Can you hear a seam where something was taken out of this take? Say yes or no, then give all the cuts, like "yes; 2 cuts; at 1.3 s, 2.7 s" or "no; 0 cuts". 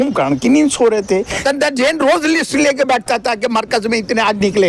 yes; 1 cut; at 1.3 s